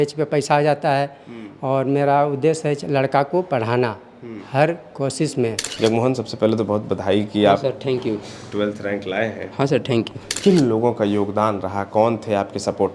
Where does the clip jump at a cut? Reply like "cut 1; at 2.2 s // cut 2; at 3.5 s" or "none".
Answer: cut 1; at 5.6 s // cut 2; at 10.3 s